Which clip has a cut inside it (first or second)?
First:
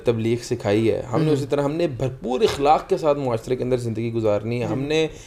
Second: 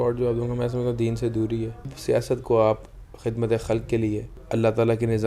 second